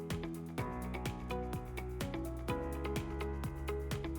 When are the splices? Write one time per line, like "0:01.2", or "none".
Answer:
none